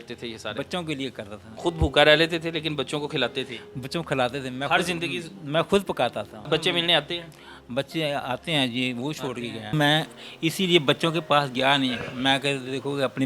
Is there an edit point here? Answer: yes; 3 cuts; at 1.6 s, 6.5 s, 9.7 s

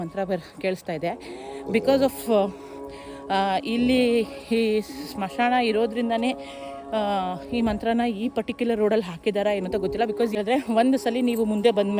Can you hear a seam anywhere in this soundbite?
yes; 1 cut; at 10.4 s

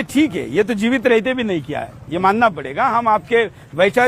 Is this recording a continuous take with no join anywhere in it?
yes; 0 cuts

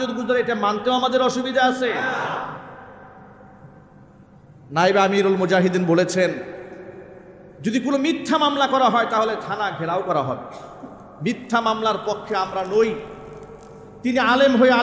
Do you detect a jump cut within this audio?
no; 0 cuts

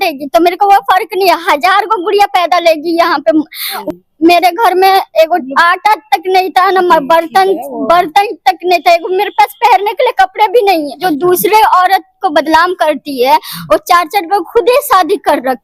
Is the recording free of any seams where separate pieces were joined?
no; 2 cuts; at 3.8 s, 11.0 s

